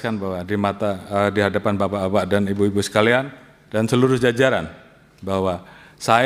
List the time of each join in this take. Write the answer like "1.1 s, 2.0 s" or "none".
none